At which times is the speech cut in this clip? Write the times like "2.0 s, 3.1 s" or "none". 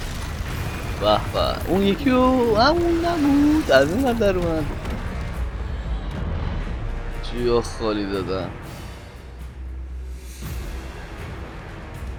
none